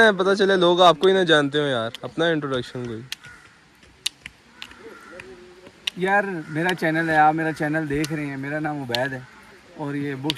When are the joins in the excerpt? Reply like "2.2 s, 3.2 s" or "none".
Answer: none